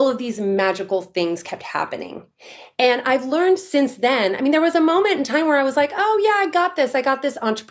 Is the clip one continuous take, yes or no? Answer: yes